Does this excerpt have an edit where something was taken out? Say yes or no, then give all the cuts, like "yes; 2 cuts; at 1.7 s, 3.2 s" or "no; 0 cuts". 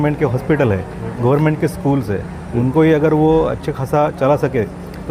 no; 0 cuts